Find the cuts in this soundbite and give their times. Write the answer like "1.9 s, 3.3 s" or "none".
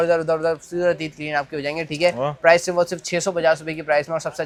none